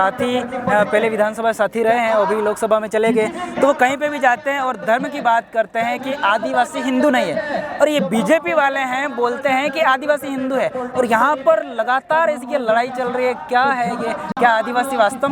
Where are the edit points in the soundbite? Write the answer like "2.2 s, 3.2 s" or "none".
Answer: none